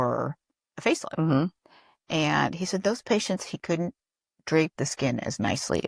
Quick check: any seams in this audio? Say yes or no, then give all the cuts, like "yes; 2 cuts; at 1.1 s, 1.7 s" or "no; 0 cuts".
no; 0 cuts